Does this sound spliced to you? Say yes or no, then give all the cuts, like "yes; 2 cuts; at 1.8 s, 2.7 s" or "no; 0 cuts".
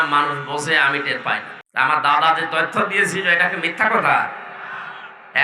yes; 1 cut; at 1.6 s